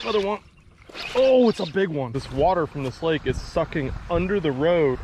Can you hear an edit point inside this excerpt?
yes; 1 cut; at 2.2 s

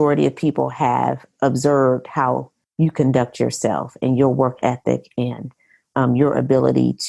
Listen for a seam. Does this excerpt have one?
no; 0 cuts

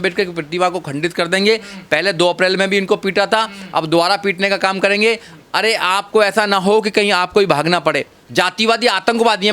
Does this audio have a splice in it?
yes; 1 cut; at 8.1 s

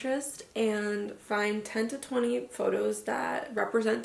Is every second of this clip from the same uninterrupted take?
yes; 0 cuts

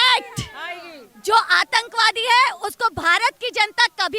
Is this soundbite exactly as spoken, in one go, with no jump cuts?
yes; 0 cuts

